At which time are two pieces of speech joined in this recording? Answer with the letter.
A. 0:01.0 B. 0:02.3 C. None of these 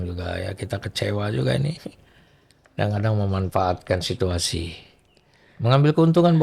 C